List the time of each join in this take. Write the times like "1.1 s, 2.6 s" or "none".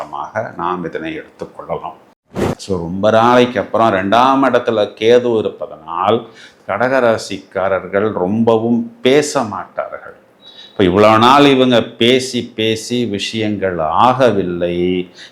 2.1 s